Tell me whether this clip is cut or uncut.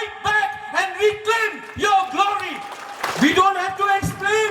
cut